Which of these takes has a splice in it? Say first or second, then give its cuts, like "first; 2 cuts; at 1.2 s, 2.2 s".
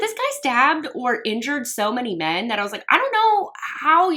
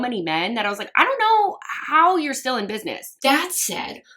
second; 1 cut; at 3.2 s